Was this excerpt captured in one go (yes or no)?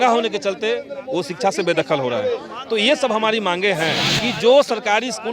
no